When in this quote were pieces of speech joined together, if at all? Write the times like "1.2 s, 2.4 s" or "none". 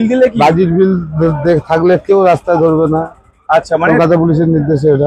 none